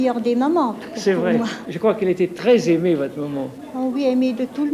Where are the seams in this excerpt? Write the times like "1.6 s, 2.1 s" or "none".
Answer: 1.6 s